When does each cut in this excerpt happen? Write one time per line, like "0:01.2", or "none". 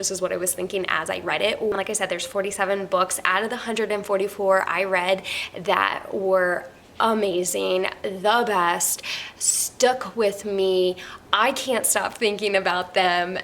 0:01.7